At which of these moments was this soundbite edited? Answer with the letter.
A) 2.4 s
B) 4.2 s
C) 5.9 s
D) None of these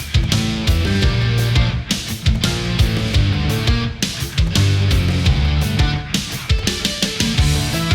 D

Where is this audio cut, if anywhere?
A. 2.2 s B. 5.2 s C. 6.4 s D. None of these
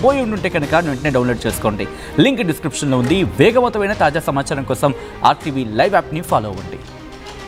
D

